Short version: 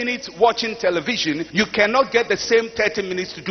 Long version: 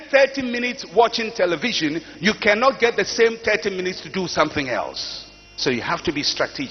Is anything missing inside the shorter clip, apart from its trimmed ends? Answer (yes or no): yes